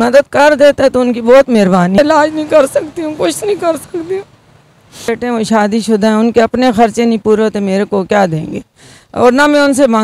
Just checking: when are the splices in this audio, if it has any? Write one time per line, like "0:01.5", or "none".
0:02.0
0:05.1